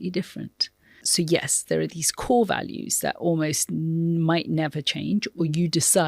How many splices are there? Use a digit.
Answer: 1